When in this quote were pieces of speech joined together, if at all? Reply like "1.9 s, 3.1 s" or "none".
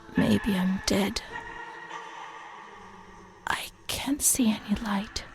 1.3 s, 3.3 s